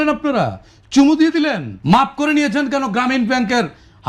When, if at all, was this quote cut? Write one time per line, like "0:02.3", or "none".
0:01.7